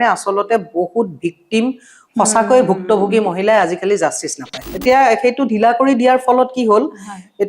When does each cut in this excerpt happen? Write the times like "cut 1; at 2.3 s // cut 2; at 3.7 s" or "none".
cut 1; at 4.6 s